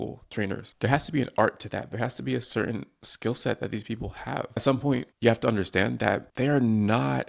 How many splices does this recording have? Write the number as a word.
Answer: one